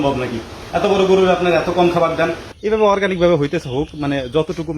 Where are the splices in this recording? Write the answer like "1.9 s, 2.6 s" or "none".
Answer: 2.5 s